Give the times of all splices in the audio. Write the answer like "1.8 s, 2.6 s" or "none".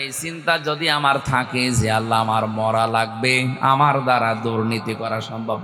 none